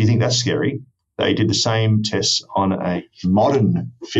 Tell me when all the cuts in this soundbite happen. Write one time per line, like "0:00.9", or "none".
0:03.0